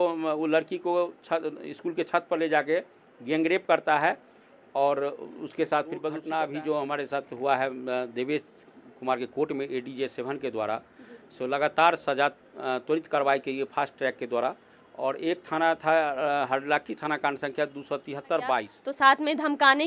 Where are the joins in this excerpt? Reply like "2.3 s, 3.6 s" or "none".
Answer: 6.2 s, 18.8 s